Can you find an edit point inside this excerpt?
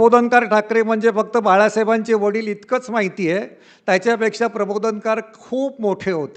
no; 0 cuts

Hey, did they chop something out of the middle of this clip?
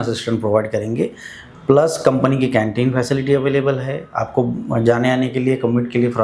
no; 0 cuts

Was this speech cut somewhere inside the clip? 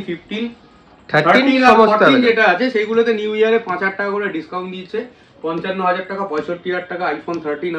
no; 0 cuts

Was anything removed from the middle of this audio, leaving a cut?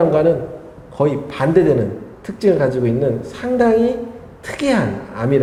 no; 0 cuts

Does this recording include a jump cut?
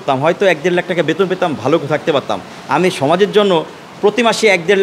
no; 0 cuts

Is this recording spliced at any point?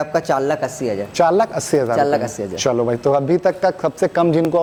no; 0 cuts

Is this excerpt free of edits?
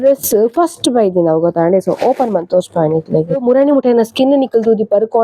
no; 1 cut; at 3.3 s

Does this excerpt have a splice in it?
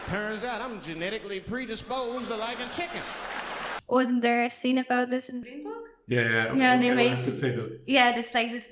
yes; 1 cut; at 5.4 s

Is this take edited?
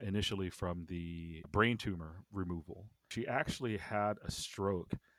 yes; 2 cuts; at 1.4 s, 3.1 s

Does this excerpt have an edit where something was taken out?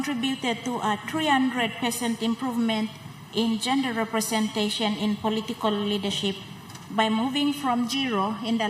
no; 0 cuts

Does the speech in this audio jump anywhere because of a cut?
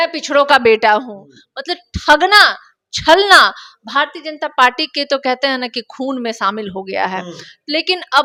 no; 0 cuts

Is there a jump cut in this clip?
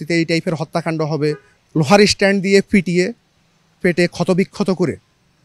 yes; 1 cut; at 1.5 s

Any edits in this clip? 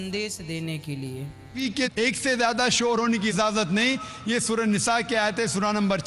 yes; 1 cut; at 1.6 s

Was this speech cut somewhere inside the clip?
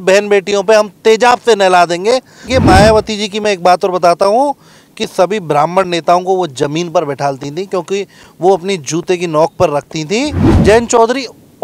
yes; 2 cuts; at 2.5 s, 10.5 s

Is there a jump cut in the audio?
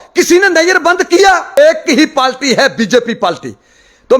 yes; 1 cut; at 1.6 s

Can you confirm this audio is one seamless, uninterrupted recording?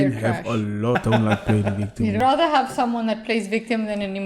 no; 2 cuts; at 0.9 s, 2.2 s

